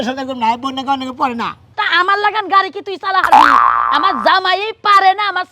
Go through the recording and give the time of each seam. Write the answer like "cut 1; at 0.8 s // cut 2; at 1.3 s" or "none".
cut 1; at 1.7 s